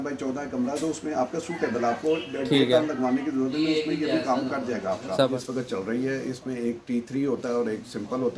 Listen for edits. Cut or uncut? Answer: cut